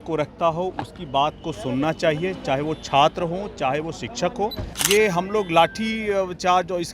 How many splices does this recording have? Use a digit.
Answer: 1